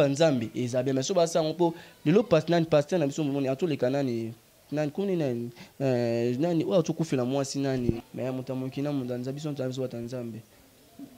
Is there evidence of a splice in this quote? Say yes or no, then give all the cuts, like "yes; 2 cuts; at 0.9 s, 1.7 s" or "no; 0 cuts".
yes; 1 cut; at 8.0 s